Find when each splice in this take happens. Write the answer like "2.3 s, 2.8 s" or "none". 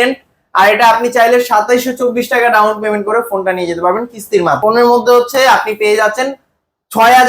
4.6 s

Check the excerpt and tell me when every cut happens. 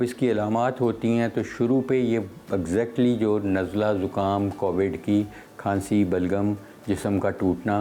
none

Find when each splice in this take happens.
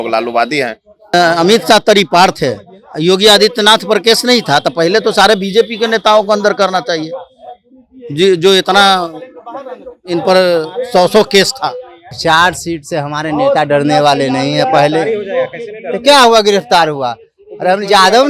1.1 s, 12.1 s

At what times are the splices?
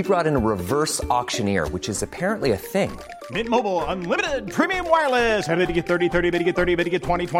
none

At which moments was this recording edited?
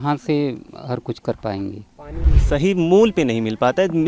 2.2 s

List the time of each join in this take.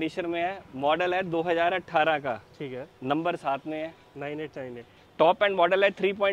none

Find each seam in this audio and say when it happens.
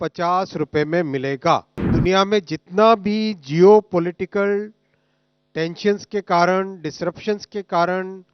1.9 s

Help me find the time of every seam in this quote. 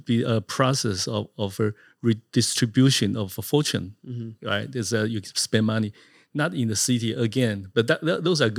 none

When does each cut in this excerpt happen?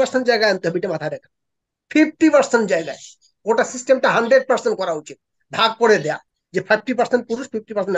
none

